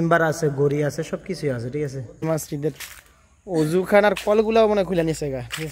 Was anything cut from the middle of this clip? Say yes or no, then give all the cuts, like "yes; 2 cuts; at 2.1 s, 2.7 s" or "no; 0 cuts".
yes; 1 cut; at 2.2 s